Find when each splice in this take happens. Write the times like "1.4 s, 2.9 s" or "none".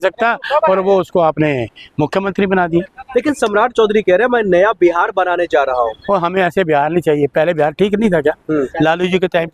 none